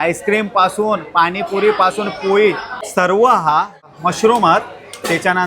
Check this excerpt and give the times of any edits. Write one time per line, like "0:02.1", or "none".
0:02.7
0:03.9